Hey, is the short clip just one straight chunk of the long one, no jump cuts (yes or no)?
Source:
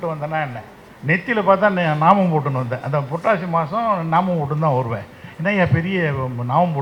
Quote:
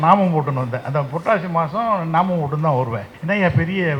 no